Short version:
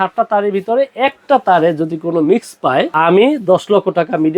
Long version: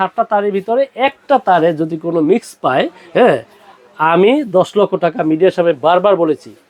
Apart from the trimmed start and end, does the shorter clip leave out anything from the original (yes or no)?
yes